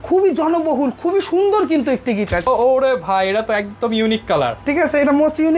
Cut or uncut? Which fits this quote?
cut